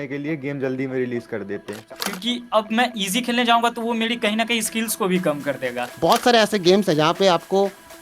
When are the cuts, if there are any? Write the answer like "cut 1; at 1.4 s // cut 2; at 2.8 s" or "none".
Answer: cut 1; at 1.7 s // cut 2; at 5.9 s